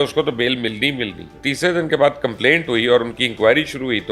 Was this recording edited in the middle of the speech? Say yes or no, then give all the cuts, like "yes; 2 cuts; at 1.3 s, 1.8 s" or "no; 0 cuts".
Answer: yes; 1 cut; at 1.3 s